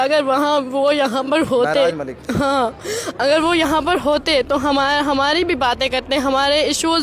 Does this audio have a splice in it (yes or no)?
no